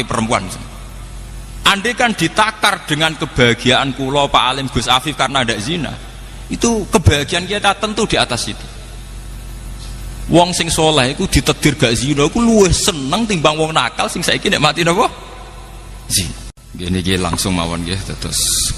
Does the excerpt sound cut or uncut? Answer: cut